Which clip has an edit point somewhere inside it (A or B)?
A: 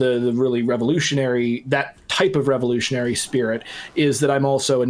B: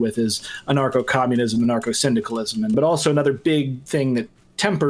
B